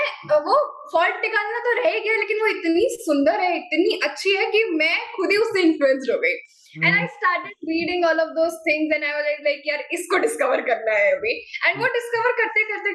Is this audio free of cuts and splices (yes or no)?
yes